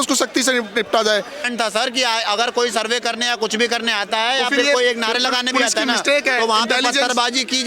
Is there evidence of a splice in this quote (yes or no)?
yes